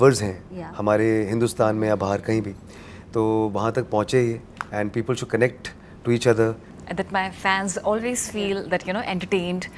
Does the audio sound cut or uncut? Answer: cut